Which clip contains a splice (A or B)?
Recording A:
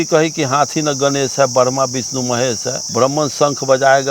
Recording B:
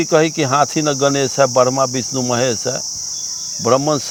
A